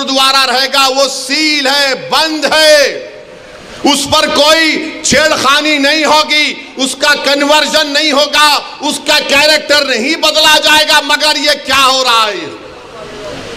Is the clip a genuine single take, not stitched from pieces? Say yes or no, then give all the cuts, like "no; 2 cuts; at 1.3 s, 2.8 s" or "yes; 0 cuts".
yes; 0 cuts